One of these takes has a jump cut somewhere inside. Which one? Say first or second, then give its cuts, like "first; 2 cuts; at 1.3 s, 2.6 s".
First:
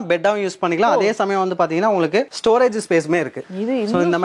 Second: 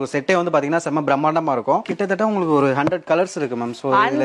second; 1 cut; at 1.9 s